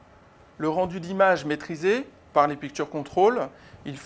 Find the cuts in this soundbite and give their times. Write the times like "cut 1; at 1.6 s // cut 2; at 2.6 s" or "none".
none